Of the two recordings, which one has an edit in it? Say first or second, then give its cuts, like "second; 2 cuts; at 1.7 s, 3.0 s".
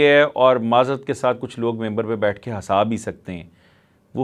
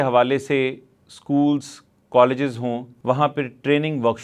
second; 1 cut; at 2.9 s